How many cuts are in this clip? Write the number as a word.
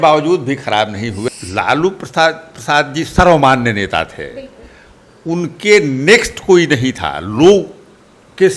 one